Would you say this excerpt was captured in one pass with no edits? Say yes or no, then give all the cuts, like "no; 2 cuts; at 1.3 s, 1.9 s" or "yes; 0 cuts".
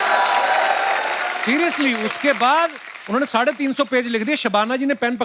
yes; 0 cuts